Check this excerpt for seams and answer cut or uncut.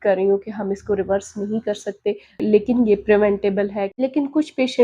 cut